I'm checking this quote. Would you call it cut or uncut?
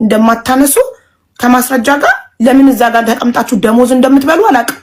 uncut